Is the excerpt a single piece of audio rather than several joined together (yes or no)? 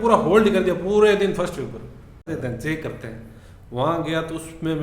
no